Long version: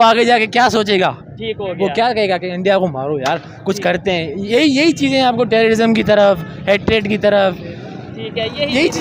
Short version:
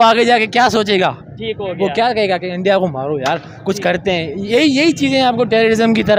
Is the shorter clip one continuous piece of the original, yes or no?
yes